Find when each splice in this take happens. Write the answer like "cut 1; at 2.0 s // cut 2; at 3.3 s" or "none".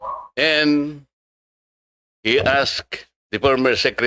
none